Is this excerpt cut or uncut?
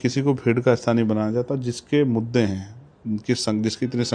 uncut